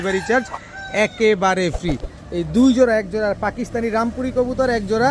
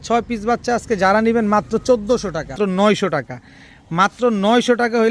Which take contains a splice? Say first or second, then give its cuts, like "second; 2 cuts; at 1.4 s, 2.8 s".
second; 1 cut; at 2.5 s